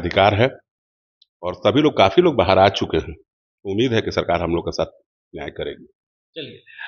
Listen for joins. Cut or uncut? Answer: uncut